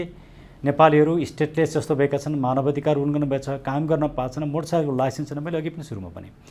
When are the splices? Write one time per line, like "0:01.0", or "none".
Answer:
none